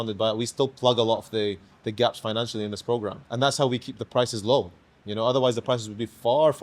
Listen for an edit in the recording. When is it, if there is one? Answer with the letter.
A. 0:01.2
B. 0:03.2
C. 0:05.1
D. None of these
B